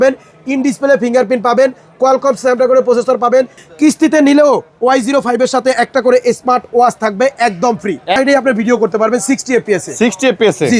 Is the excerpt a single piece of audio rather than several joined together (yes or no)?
no